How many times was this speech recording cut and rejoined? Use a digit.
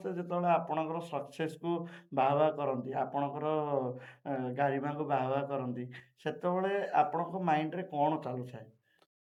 0